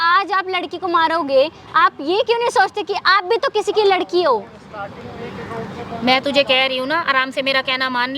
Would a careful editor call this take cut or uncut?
uncut